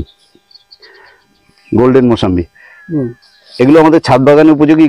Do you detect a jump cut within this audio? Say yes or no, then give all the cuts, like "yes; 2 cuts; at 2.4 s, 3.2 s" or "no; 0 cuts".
no; 0 cuts